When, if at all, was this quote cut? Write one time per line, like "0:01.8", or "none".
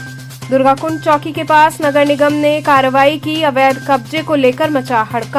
none

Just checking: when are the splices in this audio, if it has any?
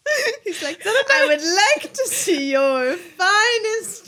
none

